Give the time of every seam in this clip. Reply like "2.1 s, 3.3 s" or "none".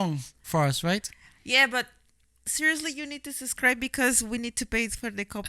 none